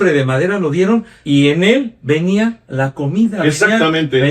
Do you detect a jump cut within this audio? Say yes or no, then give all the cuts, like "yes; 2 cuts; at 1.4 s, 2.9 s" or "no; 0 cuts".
yes; 2 cuts; at 1.1 s, 2.6 s